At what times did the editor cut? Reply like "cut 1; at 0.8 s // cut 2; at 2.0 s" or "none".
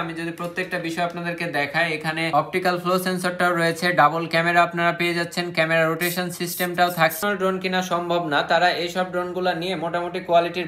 cut 1; at 2.3 s // cut 2; at 7.2 s